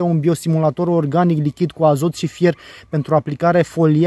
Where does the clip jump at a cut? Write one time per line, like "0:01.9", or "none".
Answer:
none

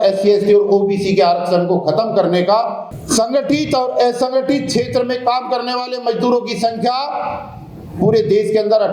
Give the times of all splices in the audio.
0:02.9

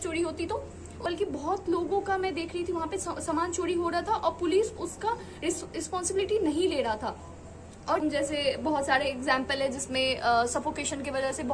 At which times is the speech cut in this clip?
0:01.0
0:08.0

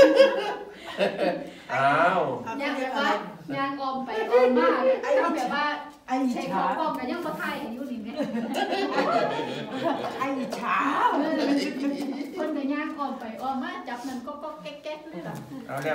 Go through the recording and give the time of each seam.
none

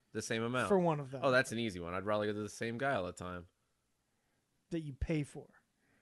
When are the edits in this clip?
none

